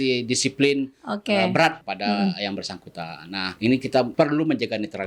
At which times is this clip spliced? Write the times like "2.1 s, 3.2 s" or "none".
1.9 s, 3.5 s, 4.1 s